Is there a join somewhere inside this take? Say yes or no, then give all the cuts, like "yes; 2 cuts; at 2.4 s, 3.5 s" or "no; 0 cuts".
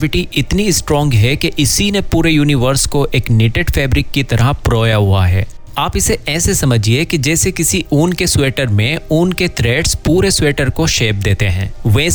no; 0 cuts